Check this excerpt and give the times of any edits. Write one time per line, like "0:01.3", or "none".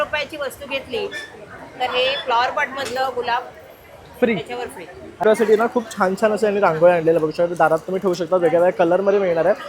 0:05.2

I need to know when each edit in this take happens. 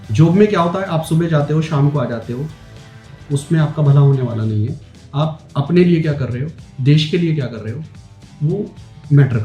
none

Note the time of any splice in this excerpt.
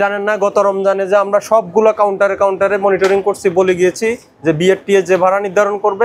none

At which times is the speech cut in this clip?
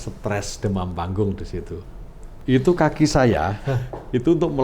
0:02.3

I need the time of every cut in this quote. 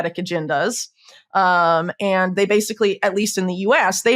none

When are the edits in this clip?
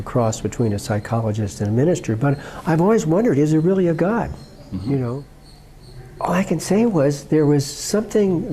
0:05.3

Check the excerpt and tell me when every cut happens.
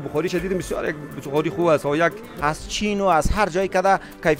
0:02.3

